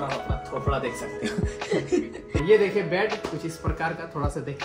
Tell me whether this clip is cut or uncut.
cut